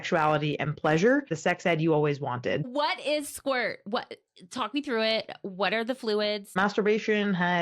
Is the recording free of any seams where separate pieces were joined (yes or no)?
no